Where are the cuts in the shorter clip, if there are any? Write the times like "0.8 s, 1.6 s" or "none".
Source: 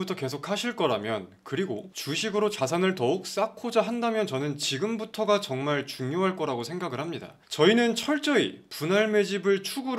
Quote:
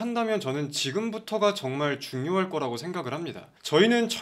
none